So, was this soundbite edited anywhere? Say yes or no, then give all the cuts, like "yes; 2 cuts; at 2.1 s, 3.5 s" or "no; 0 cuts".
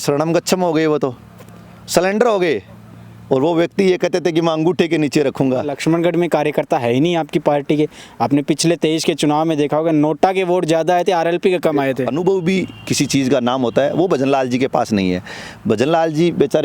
yes; 2 cuts; at 5.7 s, 12.1 s